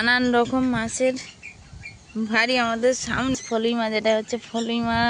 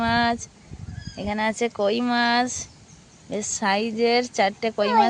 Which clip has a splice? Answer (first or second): first